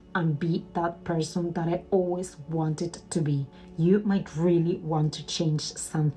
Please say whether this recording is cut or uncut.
cut